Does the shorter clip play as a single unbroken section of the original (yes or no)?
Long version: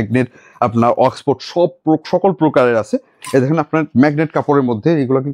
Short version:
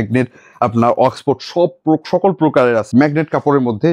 no